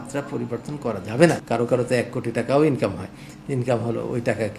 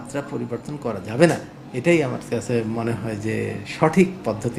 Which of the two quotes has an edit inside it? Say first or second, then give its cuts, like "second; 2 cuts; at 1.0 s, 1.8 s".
first; 1 cut; at 1.4 s